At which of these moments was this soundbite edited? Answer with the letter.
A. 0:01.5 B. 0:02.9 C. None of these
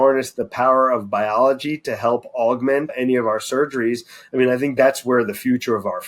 B